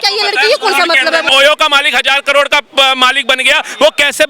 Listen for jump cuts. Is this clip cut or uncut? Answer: cut